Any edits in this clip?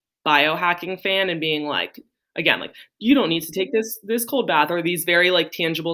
no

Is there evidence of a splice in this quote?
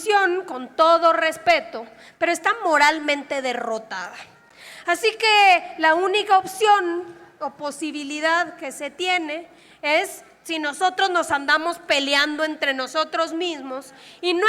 no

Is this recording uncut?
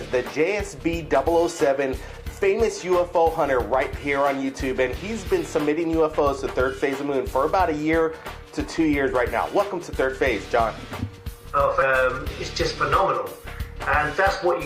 yes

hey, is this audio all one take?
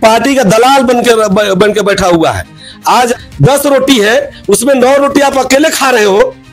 no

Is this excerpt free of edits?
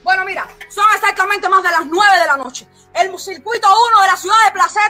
no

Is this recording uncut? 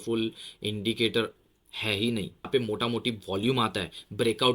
no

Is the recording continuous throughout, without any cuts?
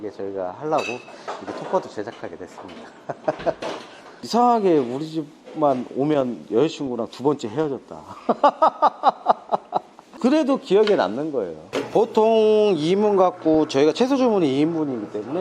no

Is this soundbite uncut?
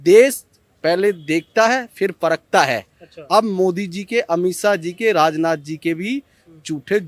yes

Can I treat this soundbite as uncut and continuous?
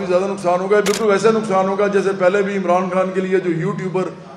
yes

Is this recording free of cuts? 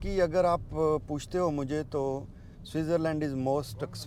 yes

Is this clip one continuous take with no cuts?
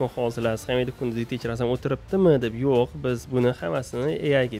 yes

